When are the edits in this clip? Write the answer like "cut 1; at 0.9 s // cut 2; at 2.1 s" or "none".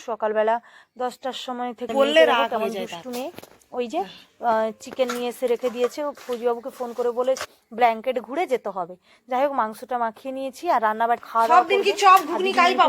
cut 1; at 1.9 s // cut 2; at 7.4 s // cut 3; at 11.3 s